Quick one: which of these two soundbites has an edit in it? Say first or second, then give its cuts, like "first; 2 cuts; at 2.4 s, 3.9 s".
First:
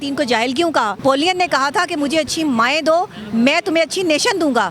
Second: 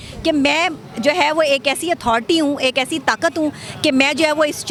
first; 1 cut; at 1.0 s